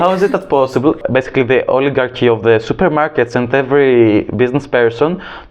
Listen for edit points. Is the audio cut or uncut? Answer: cut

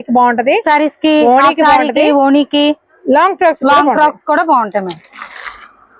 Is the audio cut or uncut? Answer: uncut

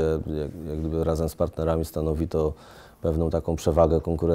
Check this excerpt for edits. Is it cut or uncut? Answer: uncut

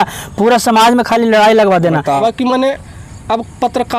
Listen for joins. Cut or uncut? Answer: cut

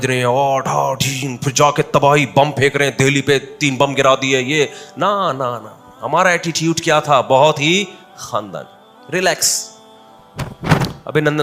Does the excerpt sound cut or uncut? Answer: uncut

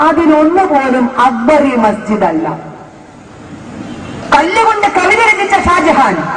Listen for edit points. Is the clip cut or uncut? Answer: cut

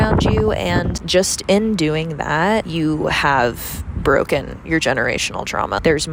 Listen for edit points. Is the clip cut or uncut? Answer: uncut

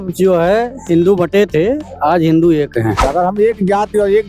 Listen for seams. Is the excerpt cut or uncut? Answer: cut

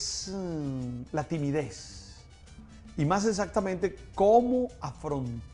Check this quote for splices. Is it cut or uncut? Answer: cut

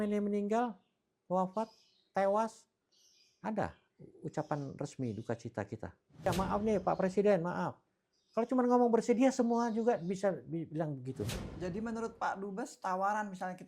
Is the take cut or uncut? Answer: cut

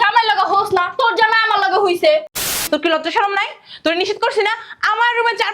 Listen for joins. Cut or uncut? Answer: cut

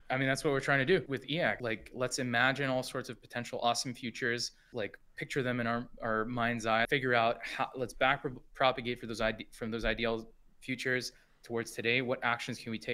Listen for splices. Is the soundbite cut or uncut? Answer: cut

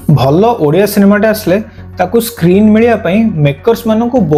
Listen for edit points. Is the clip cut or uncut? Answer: uncut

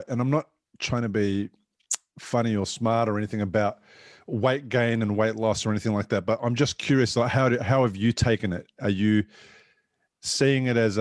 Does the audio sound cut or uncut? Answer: uncut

